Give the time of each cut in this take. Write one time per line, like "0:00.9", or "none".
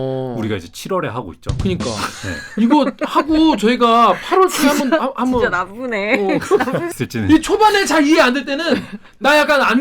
0:06.9